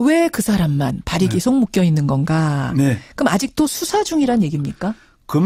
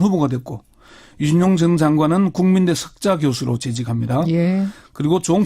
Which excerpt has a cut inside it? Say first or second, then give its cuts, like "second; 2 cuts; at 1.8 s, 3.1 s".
second; 1 cut; at 1.1 s